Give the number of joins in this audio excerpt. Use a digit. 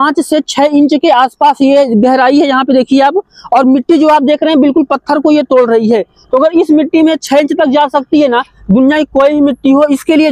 0